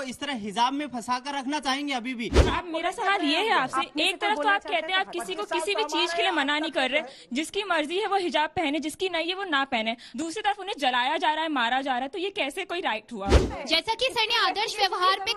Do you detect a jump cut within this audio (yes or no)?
yes